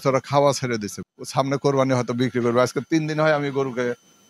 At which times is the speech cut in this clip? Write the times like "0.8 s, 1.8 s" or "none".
0.9 s